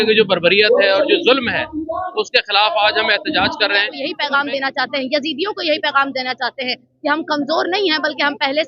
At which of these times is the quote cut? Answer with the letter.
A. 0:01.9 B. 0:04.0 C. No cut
B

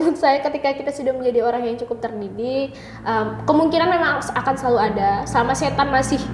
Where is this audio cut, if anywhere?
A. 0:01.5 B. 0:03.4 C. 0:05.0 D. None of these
D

